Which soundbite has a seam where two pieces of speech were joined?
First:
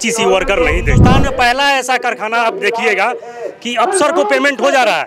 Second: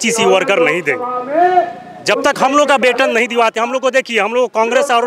first; 1 cut; at 0.9 s

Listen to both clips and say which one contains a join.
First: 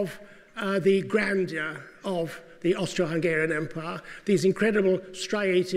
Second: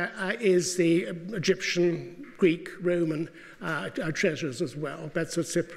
second; 1 cut; at 2.0 s

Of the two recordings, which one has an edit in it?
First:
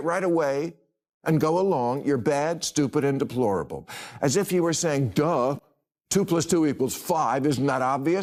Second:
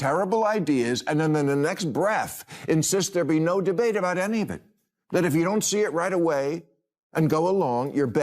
second; 1 cut; at 5.0 s

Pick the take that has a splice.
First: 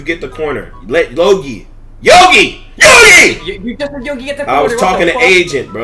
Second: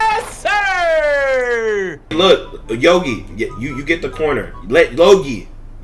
second; 1 cut; at 2.1 s

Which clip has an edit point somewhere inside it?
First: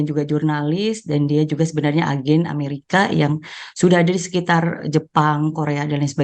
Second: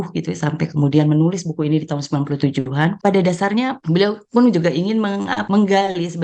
second; 3 cuts; at 3.0 s, 3.8 s, 5.4 s

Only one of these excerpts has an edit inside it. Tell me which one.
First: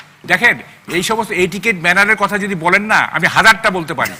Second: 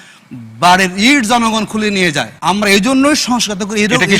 second; 1 cut; at 2.3 s

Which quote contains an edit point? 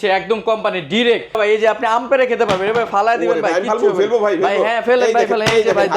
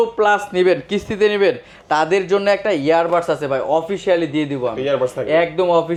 first; 1 cut; at 1.4 s

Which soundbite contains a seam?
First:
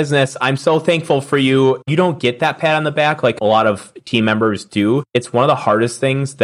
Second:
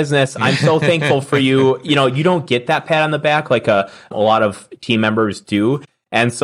first; 3 cuts; at 1.8 s, 3.4 s, 5.1 s

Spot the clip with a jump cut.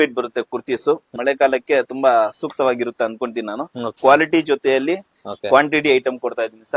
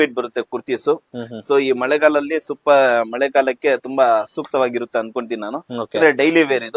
first; 2 cuts; at 1.2 s, 4.0 s

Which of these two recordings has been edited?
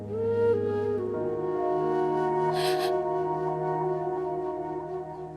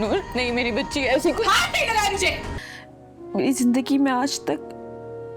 second; 1 cut; at 2.6 s

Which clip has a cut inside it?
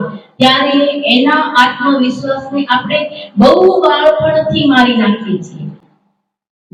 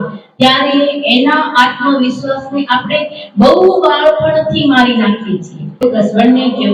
second; 1 cut; at 5.8 s

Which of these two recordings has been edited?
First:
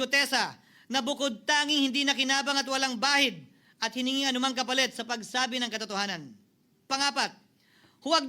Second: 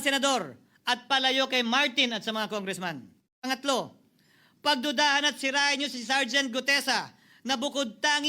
second; 1 cut; at 3.2 s

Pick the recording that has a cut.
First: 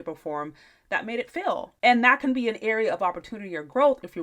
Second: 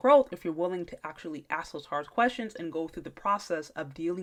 first; 1 cut; at 1.7 s

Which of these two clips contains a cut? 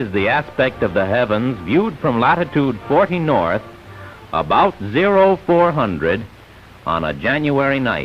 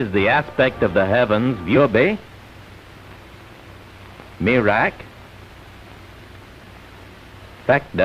first; 1 cut; at 1.8 s

